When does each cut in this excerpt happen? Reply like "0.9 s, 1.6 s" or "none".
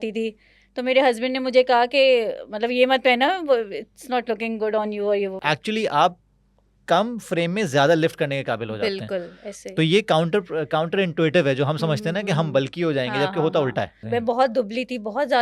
5.4 s, 14.0 s